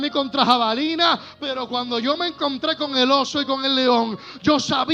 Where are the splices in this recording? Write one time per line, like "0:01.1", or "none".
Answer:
none